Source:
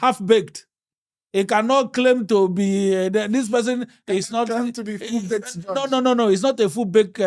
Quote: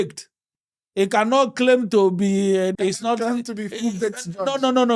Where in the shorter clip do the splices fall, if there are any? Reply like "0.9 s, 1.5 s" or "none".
2.7 s